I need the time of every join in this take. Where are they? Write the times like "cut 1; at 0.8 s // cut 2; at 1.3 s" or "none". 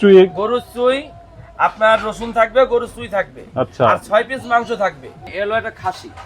cut 1; at 5.2 s